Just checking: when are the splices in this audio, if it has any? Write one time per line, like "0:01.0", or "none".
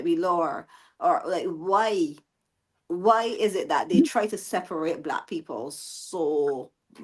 none